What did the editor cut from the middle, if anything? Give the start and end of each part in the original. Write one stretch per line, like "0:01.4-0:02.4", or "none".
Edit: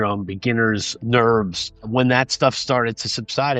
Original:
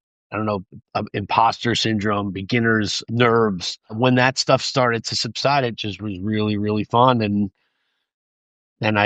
none

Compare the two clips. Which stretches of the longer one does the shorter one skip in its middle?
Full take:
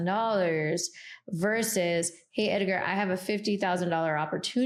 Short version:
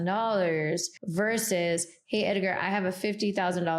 0:01.0-0:01.2

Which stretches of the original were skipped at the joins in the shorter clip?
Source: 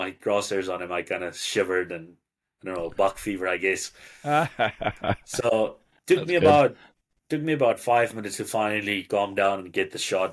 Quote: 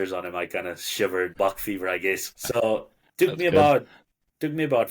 0:01.9-0:02.9
0:04.0-0:05.3

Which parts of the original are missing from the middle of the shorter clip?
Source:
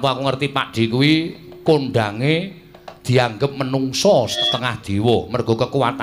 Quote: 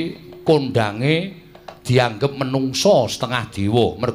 0:04.4-0:04.5

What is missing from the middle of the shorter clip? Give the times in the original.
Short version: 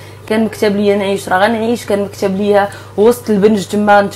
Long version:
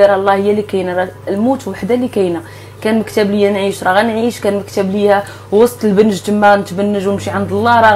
none

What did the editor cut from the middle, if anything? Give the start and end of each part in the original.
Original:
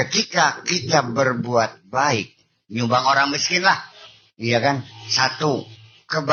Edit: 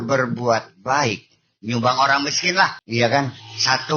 0:03.9-0:04.3

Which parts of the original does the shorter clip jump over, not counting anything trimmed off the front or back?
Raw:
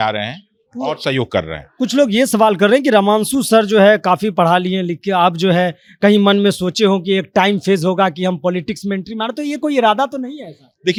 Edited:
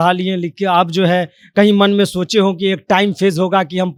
none

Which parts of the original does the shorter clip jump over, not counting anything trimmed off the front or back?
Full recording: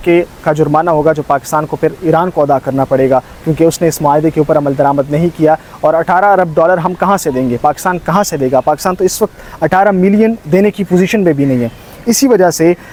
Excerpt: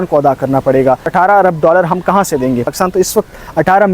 0:03.3-0:06.0
0:07.6-0:08.7

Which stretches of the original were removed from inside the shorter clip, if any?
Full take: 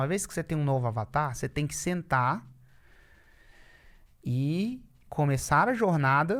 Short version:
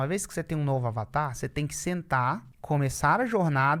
0:02.5-0:05.0

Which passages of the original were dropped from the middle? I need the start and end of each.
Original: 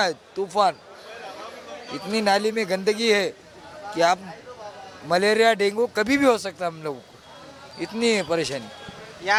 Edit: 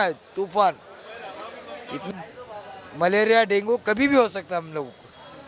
0:02.1-0:04.2

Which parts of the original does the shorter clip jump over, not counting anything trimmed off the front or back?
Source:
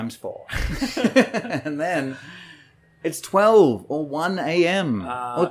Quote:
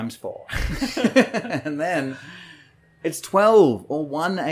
none

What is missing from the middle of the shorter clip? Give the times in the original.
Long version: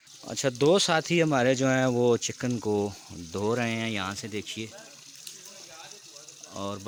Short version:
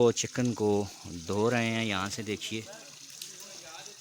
none

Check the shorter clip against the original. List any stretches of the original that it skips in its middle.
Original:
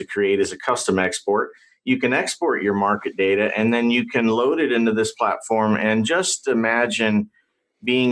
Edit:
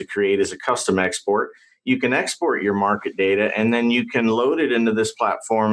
none

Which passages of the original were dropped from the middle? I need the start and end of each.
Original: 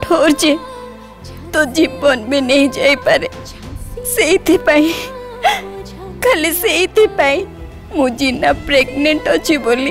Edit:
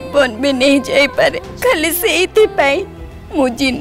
0:03.3-0:06.1

